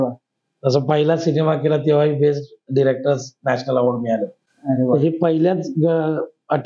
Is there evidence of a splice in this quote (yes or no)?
no